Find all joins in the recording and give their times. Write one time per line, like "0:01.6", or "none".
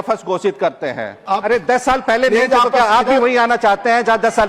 0:01.2